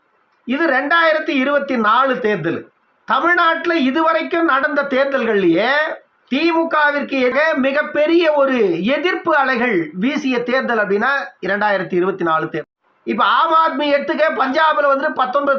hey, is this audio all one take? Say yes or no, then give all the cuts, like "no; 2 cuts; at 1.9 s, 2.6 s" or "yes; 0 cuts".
no; 1 cut; at 12.6 s